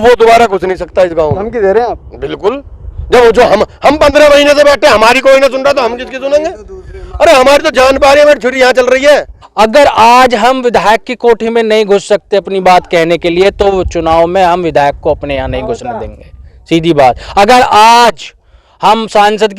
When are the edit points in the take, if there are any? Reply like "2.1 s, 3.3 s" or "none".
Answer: 9.4 s